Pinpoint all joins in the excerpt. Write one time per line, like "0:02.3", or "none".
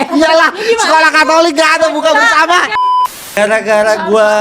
0:03.0